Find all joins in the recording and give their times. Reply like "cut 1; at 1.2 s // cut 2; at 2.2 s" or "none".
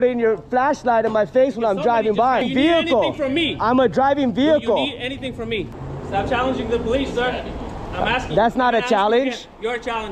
cut 1; at 2.4 s // cut 2; at 5.6 s